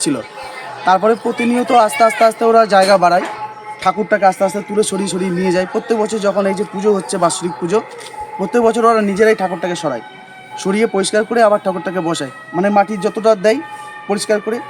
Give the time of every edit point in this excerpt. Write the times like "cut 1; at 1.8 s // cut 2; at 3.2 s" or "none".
none